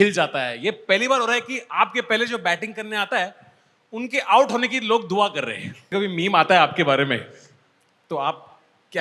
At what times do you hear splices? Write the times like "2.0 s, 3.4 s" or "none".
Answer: 5.9 s